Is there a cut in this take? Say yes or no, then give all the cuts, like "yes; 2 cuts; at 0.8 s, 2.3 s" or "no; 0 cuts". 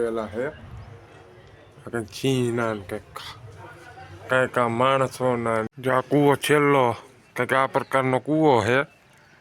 yes; 1 cut; at 5.7 s